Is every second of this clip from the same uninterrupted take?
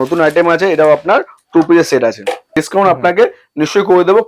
no; 1 cut; at 2.5 s

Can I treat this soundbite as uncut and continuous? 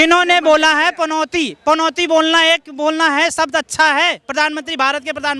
yes; 0 cuts

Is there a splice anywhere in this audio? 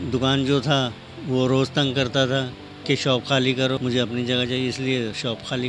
yes; 1 cut; at 3.8 s

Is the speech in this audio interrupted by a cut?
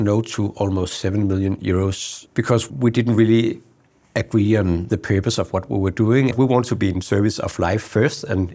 yes; 2 cuts; at 2.1 s, 6.3 s

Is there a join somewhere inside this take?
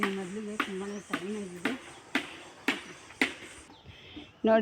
no; 0 cuts

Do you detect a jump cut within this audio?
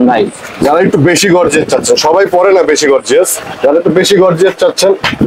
no; 0 cuts

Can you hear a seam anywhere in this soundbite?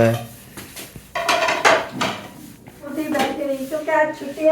yes; 1 cut; at 2.9 s

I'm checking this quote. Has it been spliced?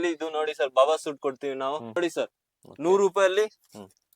yes; 1 cut; at 2.0 s

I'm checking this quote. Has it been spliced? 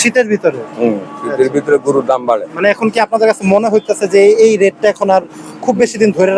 no; 0 cuts

